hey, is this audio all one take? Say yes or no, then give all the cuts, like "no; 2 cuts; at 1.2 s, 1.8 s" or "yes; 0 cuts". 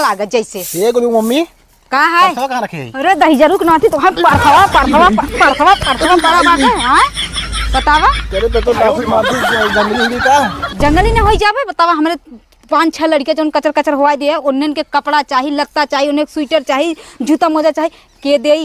yes; 0 cuts